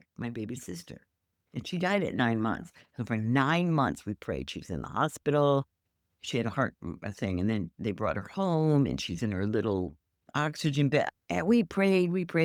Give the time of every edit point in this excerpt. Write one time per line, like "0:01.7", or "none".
none